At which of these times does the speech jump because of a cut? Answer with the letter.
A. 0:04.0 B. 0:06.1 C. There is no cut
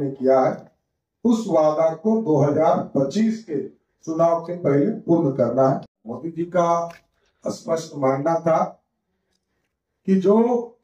B